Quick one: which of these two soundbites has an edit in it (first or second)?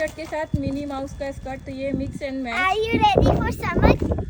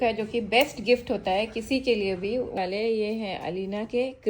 second